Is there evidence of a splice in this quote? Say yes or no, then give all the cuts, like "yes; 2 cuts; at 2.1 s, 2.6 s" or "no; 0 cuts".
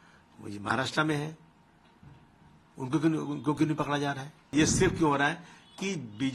yes; 1 cut; at 4.5 s